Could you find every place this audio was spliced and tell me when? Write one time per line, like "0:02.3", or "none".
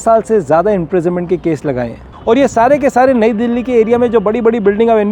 0:02.0